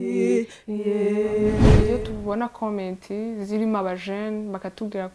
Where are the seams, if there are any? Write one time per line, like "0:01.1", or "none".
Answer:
0:01.9